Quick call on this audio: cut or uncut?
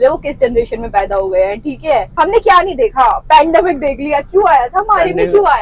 cut